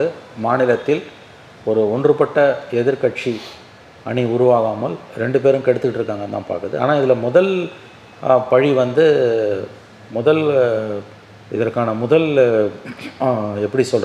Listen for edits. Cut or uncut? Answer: uncut